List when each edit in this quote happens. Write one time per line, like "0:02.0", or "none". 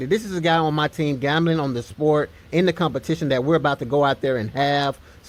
none